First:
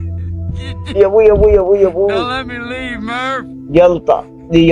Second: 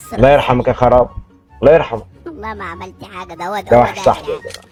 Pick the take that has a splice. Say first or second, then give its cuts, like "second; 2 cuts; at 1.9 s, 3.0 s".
first; 1 cut; at 0.9 s